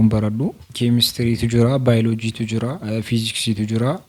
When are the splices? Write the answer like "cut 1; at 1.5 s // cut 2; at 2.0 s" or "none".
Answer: none